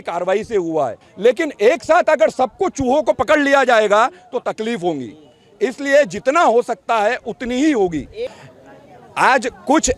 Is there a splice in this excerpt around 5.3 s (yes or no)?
no